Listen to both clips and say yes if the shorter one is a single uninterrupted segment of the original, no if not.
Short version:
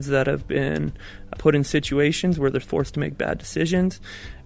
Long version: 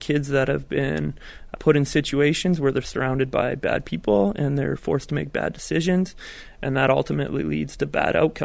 no